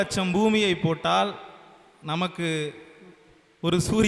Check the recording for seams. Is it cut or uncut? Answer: uncut